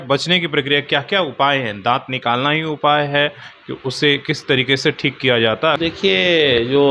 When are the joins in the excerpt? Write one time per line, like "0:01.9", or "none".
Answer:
0:05.8